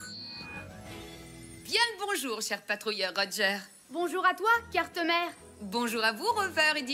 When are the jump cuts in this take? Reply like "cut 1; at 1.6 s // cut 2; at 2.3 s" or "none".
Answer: cut 1; at 1.6 s

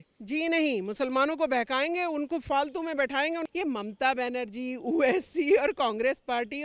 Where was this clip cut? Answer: cut 1; at 3.5 s

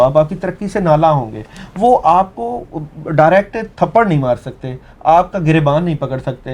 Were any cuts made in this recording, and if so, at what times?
none

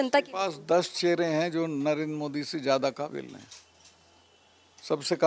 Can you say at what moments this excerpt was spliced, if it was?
none

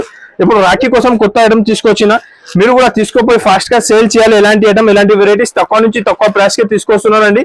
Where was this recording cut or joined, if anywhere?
none

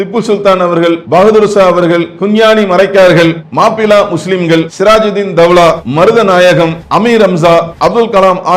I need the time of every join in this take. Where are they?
cut 1; at 1.0 s // cut 2; at 2.1 s // cut 3; at 3.4 s // cut 4; at 4.7 s // cut 5; at 5.8 s // cut 6; at 6.8 s // cut 7; at 7.7 s

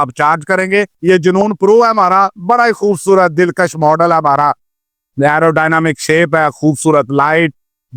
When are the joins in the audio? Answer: cut 1; at 0.9 s

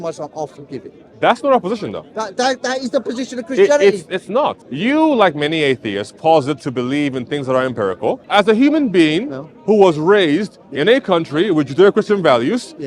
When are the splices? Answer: cut 1; at 4.6 s // cut 2; at 8.2 s

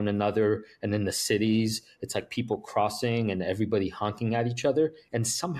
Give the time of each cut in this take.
none

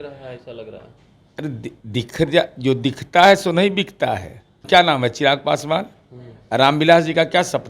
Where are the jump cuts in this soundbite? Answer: cut 1; at 4.6 s

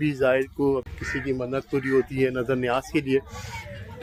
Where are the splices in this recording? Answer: none

